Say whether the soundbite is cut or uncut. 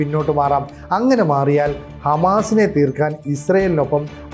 uncut